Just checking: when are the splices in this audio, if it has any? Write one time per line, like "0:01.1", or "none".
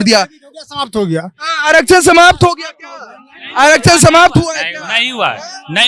none